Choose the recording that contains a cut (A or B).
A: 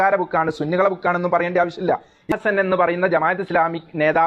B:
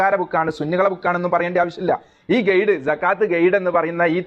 A